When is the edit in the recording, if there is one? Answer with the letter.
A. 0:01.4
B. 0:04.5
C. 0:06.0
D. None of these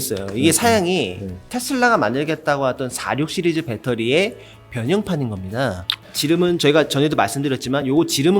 C